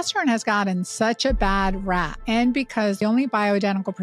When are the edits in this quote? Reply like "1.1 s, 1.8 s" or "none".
2.2 s, 3.0 s

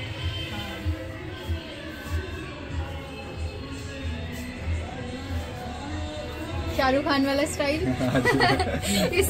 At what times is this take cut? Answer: 6.7 s

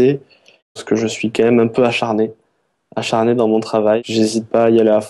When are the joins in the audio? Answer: 0.8 s, 4.0 s

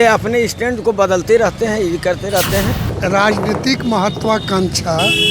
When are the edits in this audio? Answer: 2.9 s

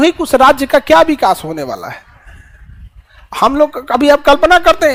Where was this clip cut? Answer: none

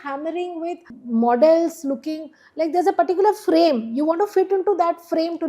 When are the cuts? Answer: 0.9 s

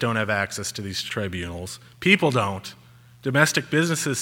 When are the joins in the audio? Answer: 1.0 s

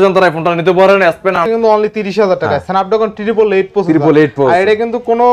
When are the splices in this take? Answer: 1.4 s

